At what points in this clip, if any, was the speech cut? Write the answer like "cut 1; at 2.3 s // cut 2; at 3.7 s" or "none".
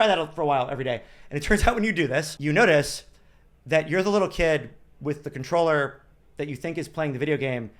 cut 1; at 2.3 s